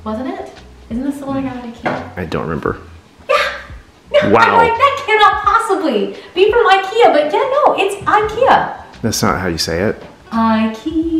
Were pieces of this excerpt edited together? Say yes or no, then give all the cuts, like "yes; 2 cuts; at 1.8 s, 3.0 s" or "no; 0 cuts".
no; 0 cuts